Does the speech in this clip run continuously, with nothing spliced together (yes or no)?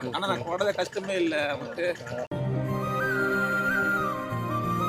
yes